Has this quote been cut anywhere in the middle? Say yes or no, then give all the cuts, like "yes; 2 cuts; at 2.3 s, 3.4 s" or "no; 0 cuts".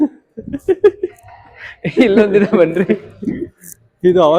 no; 0 cuts